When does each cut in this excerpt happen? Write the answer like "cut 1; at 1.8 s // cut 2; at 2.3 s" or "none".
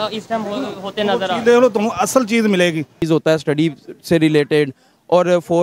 cut 1; at 3.0 s

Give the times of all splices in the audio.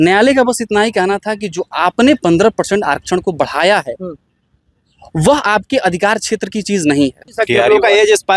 cut 1; at 7.3 s

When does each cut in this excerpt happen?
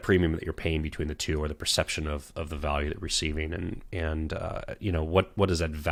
none

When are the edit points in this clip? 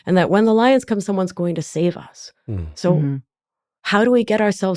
none

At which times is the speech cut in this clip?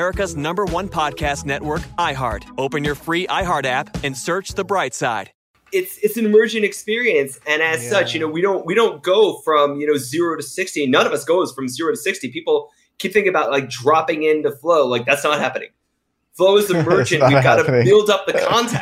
cut 1; at 5.4 s

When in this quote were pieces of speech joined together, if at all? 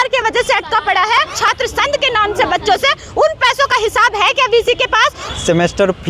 cut 1; at 1.4 s // cut 2; at 5.2 s

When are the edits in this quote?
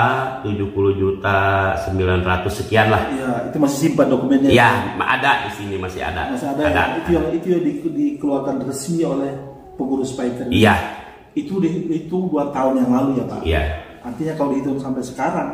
none

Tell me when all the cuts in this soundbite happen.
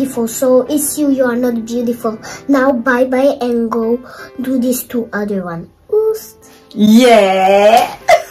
none

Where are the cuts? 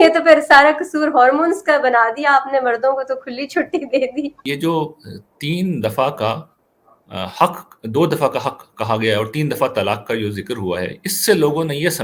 cut 1; at 4.4 s

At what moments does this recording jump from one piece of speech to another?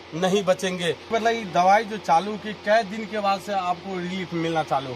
cut 1; at 1.1 s

